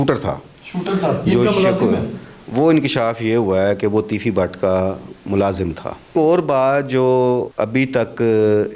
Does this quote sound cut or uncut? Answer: cut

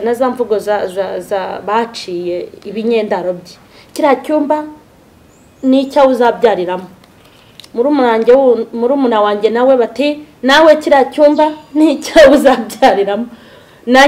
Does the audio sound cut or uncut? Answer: uncut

